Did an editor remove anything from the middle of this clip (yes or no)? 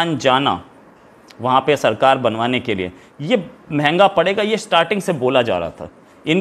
no